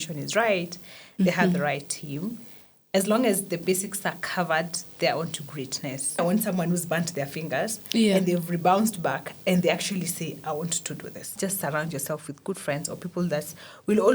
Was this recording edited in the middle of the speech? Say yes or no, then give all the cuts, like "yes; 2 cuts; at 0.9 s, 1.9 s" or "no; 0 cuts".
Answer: yes; 2 cuts; at 6.2 s, 11.3 s